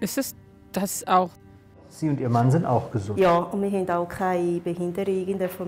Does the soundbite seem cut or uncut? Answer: cut